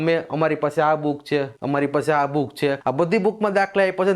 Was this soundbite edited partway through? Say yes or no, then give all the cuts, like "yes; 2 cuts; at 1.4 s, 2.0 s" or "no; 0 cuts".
yes; 2 cuts; at 1.5 s, 2.8 s